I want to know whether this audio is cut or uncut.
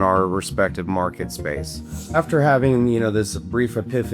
cut